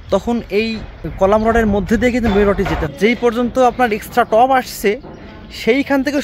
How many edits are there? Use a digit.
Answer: 1